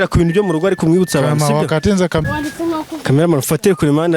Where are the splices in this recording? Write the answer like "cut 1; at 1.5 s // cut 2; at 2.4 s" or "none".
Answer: cut 1; at 2.2 s